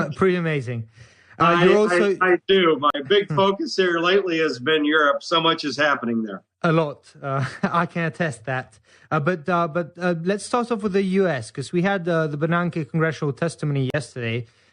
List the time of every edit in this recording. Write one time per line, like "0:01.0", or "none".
0:09.8

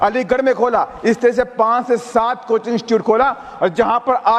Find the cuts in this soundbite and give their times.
none

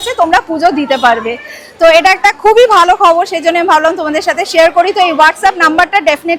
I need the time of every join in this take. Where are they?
none

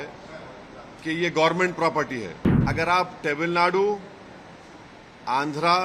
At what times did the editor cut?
0:02.5

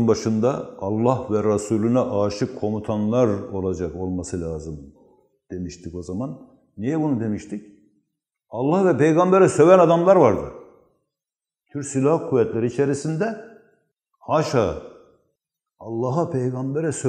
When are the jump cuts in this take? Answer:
none

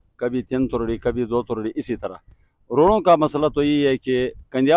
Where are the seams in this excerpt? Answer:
none

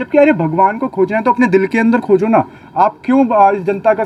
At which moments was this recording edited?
none

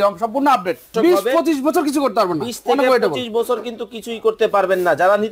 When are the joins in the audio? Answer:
0:00.9

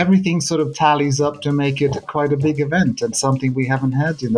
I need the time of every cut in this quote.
none

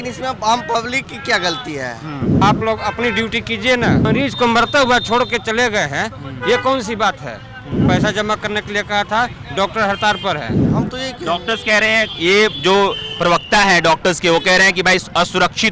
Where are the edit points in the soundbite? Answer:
0:02.4
0:04.1
0:07.8
0:10.6

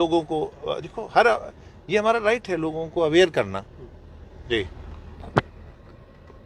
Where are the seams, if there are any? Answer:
none

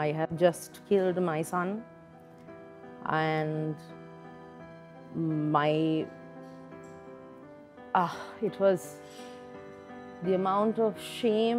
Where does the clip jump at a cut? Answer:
none

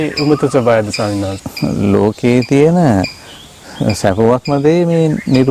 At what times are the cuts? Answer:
0:01.4

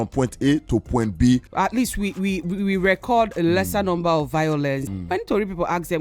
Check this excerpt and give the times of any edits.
0:01.5
0:04.9

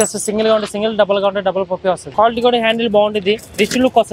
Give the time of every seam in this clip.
0:02.0

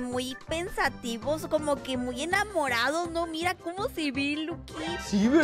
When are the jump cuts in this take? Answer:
none

